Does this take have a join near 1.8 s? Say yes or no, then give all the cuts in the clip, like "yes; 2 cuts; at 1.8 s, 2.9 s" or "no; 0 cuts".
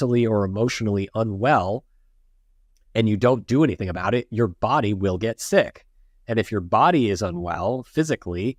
no; 0 cuts